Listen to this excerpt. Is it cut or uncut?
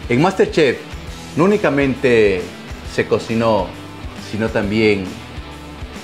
uncut